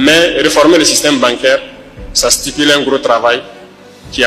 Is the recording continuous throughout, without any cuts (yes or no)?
yes